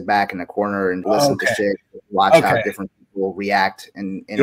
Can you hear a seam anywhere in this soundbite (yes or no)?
yes